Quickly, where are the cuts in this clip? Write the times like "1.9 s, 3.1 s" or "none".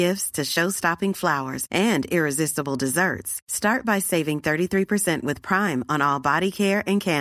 none